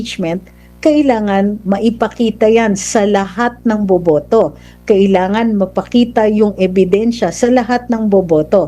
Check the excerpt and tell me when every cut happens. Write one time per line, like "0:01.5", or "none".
none